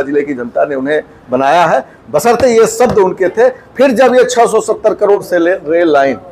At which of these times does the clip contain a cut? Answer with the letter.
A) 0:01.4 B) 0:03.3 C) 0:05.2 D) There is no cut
C